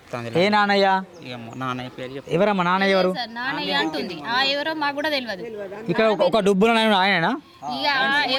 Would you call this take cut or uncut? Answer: uncut